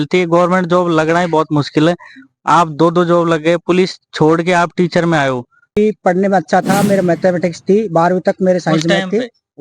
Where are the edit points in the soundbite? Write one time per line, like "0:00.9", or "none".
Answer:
0:05.7

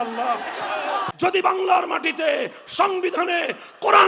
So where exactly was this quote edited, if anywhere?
0:01.0

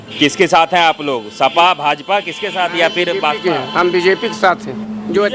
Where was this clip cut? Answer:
none

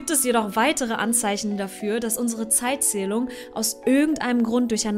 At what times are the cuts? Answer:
none

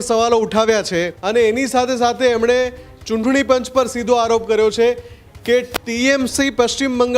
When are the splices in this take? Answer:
0:01.2

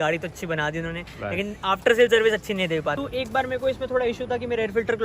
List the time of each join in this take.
0:03.0

